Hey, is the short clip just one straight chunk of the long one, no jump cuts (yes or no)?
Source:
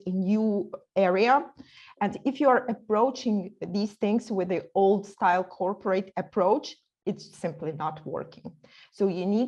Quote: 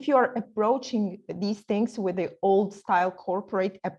yes